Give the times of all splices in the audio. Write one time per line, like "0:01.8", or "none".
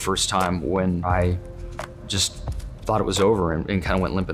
0:01.0